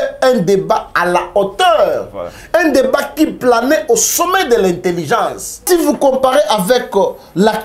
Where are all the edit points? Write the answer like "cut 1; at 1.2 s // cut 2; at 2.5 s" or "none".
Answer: cut 1; at 5.6 s